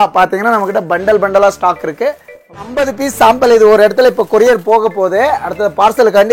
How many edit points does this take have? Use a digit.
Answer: 1